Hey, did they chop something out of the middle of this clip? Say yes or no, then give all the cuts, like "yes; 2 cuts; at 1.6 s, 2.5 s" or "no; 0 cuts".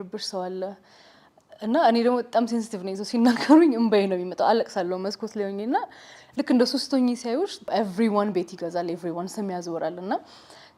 yes; 1 cut; at 7.7 s